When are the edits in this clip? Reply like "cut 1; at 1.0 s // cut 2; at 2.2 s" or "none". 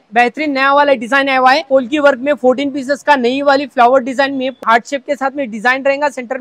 cut 1; at 1.7 s // cut 2; at 4.6 s